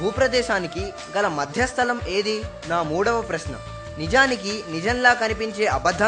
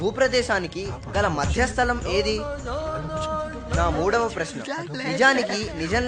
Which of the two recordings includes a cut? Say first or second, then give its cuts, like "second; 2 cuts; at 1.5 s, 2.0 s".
first; 1 cut; at 2.5 s